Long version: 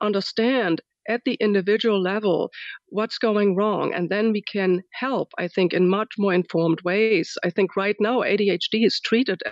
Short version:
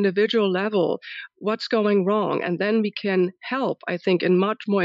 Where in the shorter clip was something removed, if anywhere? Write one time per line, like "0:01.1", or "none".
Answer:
none